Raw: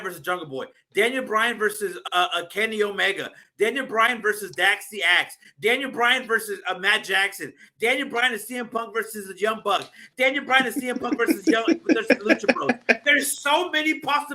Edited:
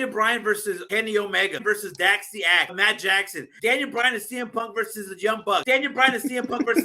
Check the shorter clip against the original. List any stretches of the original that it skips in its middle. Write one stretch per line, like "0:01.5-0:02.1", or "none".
0:02.0-0:02.5
0:03.2-0:04.2
0:05.6-0:07.3
0:09.8-0:10.2